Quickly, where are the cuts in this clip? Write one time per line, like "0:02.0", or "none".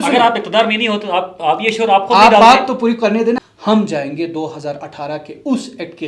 0:03.4